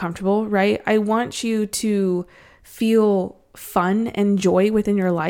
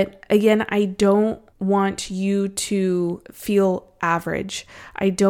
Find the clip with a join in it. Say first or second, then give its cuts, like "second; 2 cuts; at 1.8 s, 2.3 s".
second; 2 cuts; at 1.5 s, 3.3 s